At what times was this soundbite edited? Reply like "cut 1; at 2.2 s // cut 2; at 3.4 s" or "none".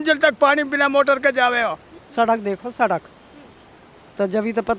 cut 1; at 2.0 s